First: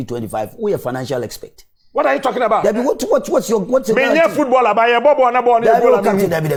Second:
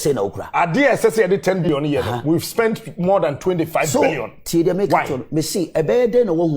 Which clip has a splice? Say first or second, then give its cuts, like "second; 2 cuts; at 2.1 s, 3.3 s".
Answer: second; 1 cut; at 1.7 s